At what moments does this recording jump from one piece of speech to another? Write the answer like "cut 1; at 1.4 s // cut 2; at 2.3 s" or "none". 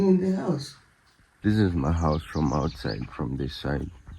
cut 1; at 1.2 s